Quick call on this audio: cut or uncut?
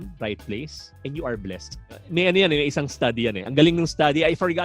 uncut